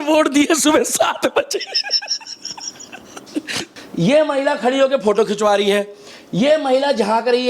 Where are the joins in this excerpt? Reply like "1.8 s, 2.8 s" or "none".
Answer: 3.6 s

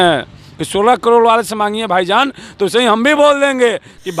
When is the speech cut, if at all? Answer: none

